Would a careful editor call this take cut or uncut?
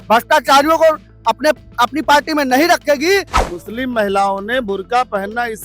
cut